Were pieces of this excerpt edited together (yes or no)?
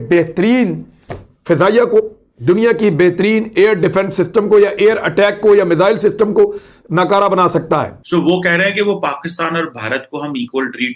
yes